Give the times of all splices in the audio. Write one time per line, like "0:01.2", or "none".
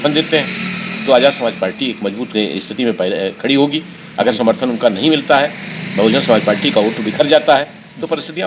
none